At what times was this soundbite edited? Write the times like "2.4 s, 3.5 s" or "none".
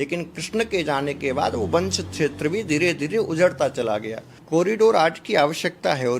4.3 s